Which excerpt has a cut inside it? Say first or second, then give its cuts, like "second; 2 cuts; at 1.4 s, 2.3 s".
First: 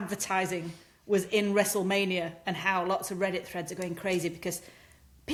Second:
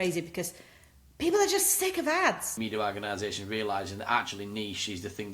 second; 1 cut; at 2.5 s